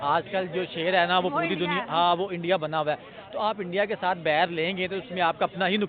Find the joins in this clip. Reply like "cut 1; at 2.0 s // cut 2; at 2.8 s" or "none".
none